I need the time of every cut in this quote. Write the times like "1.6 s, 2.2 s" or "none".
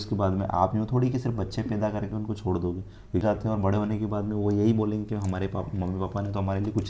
3.2 s